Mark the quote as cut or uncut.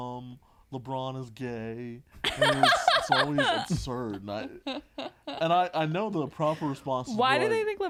uncut